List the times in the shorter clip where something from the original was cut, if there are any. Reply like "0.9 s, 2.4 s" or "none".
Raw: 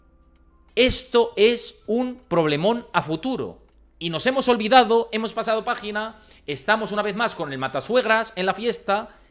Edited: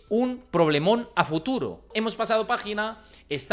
2.0 s